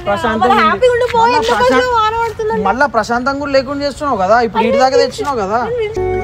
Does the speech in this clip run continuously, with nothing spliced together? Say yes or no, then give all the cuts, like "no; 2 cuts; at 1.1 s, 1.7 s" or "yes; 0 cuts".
yes; 0 cuts